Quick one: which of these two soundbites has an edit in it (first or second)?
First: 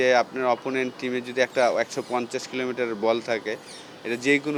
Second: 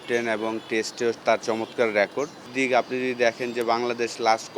second